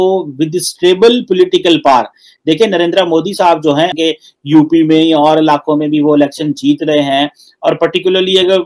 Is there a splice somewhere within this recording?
no; 0 cuts

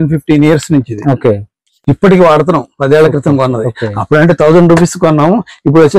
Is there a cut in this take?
no; 0 cuts

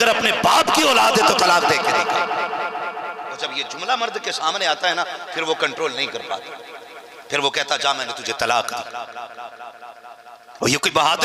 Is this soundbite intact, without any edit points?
yes; 0 cuts

